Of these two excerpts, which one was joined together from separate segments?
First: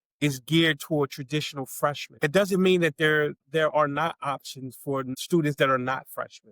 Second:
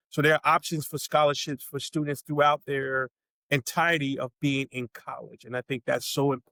first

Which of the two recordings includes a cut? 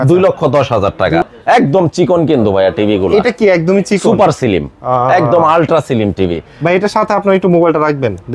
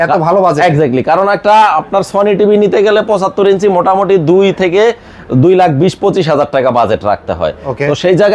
first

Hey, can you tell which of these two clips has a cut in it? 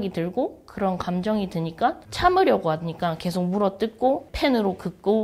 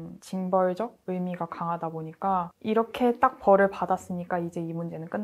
first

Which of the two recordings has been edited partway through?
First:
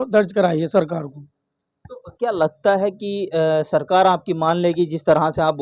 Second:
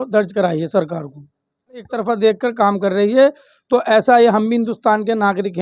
second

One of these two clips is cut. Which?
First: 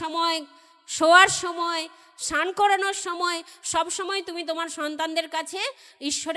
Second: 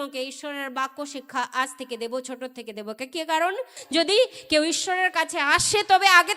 second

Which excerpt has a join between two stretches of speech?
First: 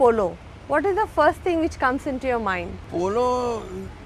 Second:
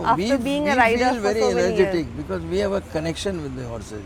first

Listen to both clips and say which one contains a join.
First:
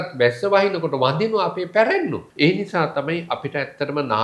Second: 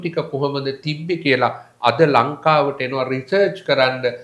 first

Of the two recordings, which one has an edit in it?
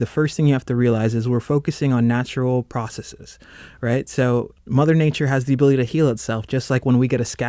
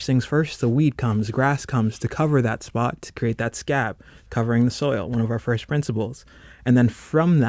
first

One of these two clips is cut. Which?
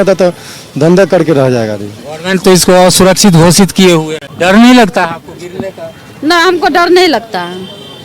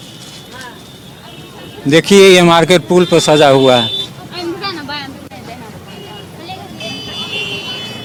first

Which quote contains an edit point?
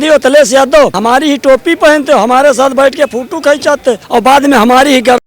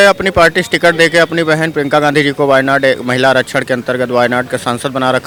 first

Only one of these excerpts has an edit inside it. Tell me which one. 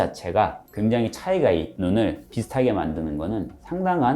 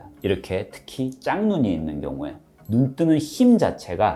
first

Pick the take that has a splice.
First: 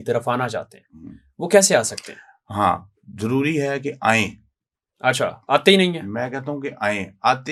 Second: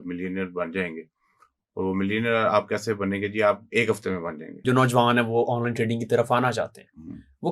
second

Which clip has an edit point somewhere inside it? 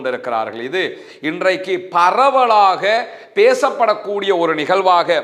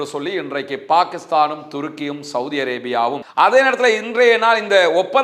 second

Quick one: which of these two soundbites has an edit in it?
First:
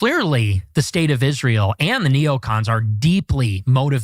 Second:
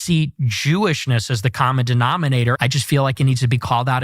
second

